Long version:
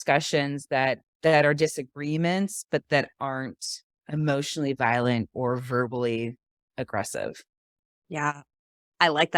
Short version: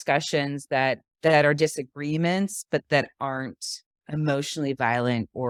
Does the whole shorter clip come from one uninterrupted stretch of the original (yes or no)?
yes